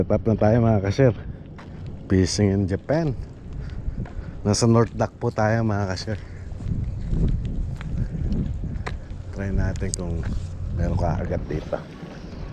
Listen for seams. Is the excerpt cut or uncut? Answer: uncut